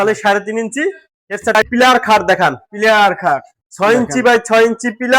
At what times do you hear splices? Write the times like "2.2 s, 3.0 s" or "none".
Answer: 1.6 s